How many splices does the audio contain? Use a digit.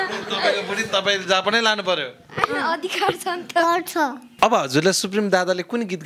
1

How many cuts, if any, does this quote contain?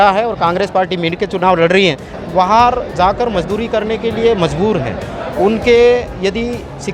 1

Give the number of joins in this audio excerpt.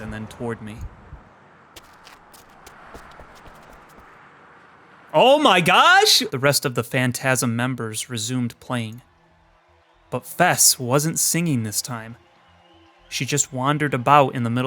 1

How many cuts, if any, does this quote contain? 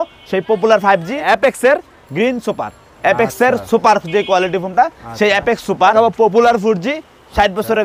2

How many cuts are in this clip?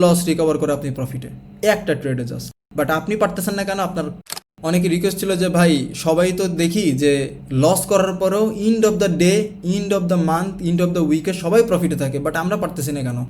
1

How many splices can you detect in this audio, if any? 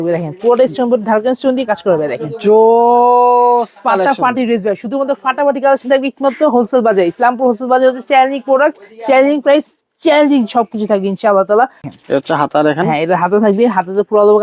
1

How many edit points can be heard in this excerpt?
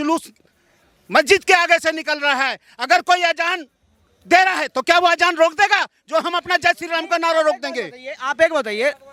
0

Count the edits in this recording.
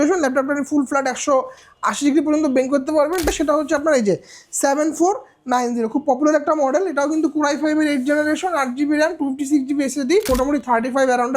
2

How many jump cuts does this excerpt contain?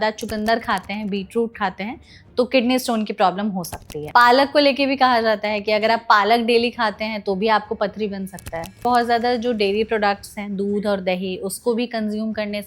2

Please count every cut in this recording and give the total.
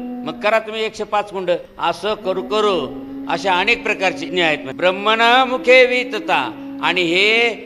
2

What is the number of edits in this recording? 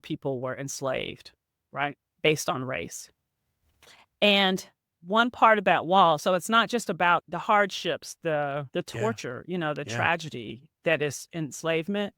1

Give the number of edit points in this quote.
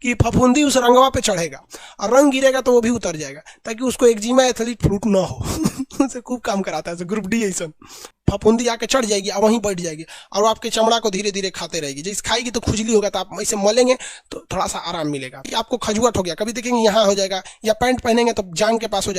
2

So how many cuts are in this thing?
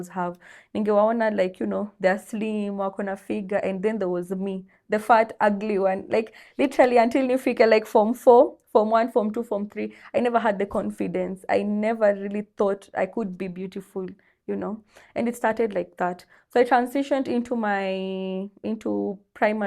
0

